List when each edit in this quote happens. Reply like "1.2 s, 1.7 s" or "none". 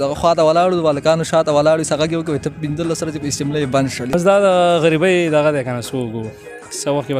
4.1 s

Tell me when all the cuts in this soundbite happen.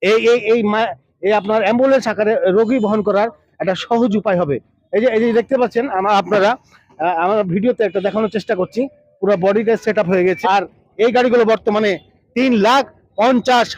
10.4 s

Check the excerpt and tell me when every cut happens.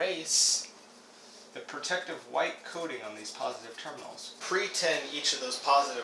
4.4 s

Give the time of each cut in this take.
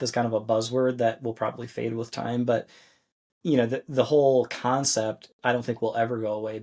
none

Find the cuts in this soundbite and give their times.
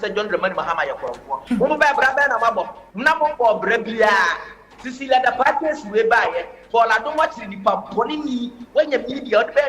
1.4 s, 2.8 s, 3.7 s

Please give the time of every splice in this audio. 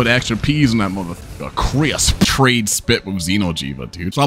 2.3 s

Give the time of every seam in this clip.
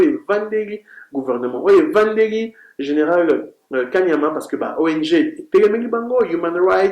none

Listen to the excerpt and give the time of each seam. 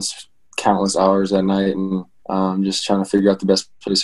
2.1 s

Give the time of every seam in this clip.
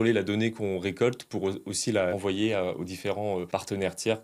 2.1 s, 3.5 s

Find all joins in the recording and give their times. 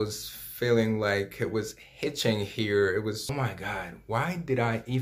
3.3 s

